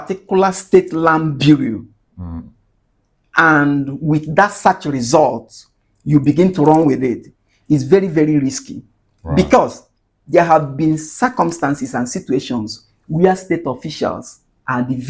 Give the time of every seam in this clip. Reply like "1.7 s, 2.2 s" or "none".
none